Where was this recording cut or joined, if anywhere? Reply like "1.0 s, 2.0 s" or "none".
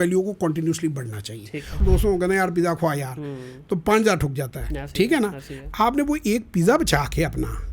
1.8 s